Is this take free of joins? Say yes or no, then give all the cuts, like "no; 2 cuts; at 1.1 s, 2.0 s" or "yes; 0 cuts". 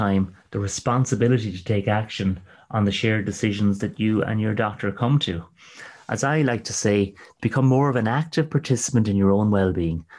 yes; 0 cuts